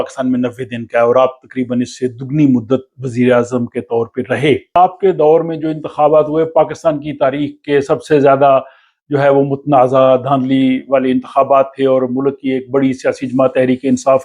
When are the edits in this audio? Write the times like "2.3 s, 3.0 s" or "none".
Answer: 4.8 s

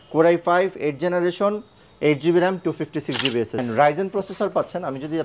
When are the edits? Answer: 3.6 s

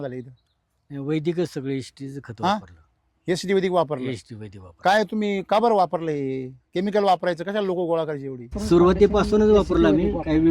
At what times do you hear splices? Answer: 8.6 s

